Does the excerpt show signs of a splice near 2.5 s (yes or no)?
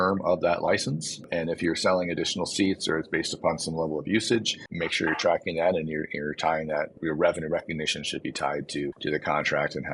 no